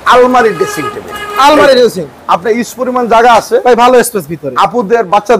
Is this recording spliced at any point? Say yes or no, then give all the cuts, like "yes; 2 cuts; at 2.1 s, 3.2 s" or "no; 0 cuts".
no; 0 cuts